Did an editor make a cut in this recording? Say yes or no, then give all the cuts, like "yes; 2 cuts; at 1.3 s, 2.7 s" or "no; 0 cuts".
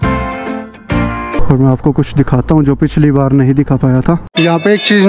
yes; 2 cuts; at 1.4 s, 4.2 s